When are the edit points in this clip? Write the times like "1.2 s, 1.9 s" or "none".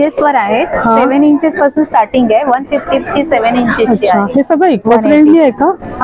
none